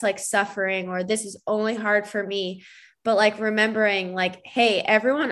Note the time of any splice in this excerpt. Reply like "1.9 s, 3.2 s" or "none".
none